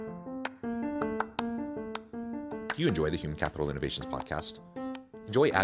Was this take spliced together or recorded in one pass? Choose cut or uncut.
uncut